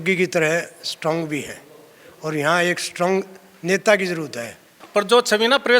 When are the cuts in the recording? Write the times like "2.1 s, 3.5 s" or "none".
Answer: 4.7 s